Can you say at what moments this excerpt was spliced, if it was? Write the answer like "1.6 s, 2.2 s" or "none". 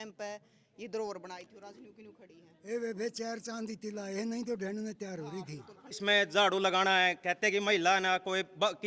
6.0 s